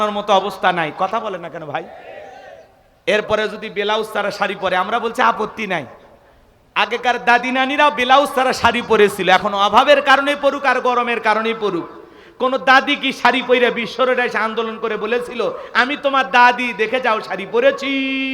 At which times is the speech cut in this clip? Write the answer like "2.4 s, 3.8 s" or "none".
none